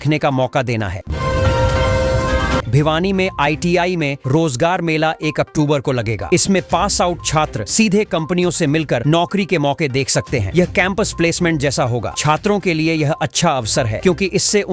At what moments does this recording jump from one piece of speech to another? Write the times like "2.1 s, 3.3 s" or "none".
1.1 s, 2.6 s